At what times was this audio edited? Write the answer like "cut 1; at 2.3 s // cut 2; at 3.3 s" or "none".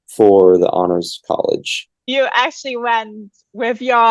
cut 1; at 2.0 s